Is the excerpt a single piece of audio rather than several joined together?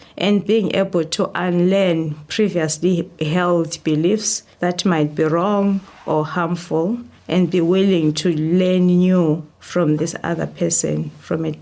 yes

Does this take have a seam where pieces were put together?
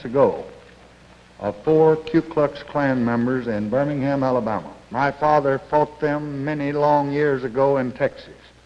yes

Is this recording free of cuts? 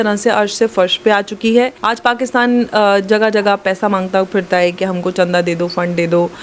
no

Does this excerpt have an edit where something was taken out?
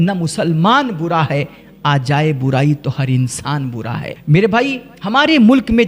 yes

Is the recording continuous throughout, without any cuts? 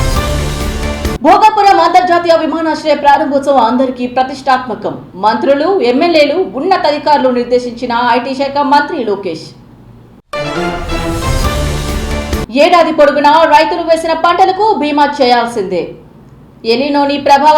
no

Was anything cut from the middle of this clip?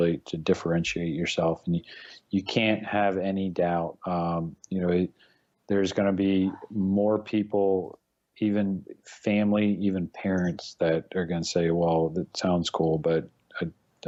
no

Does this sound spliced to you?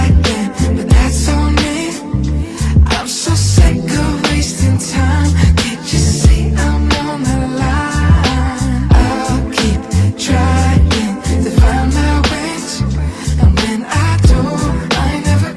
no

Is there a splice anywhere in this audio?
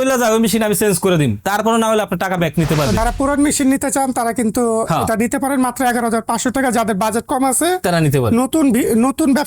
yes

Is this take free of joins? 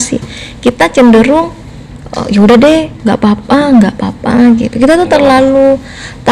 yes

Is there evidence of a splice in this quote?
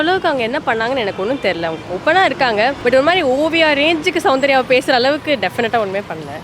no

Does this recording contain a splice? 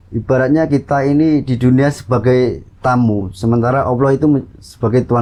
no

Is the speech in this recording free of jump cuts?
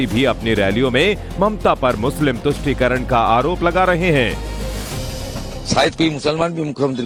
yes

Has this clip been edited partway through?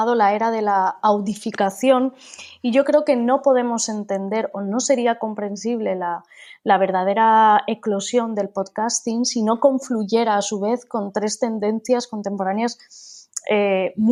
no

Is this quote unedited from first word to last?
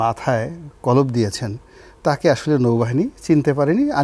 yes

